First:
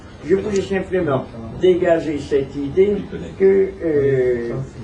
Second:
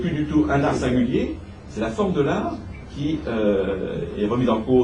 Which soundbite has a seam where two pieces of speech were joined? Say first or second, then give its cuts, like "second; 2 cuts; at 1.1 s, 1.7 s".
second; 1 cut; at 3.1 s